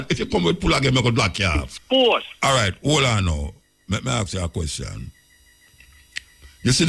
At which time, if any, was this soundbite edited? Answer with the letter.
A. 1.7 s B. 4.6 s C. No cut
A